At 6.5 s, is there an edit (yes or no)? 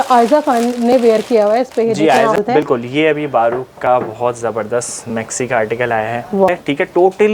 yes